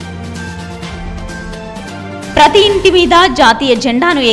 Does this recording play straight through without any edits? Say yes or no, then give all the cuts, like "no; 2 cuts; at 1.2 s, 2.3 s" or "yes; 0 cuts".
no; 1 cut; at 1.0 s